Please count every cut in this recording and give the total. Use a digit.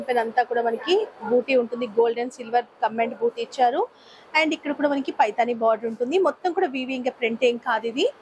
0